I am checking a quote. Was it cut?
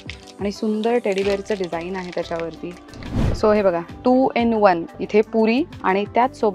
yes; 1 cut; at 3.4 s

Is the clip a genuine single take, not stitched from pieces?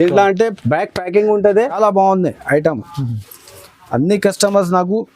no; 1 cut; at 1.7 s

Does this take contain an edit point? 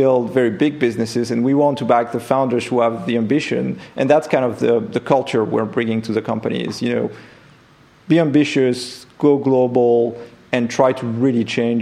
no; 0 cuts

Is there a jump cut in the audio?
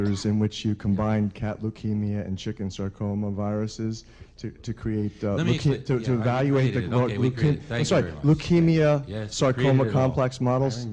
no; 0 cuts

